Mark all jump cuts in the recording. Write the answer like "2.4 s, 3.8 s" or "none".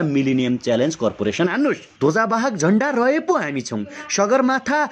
1.9 s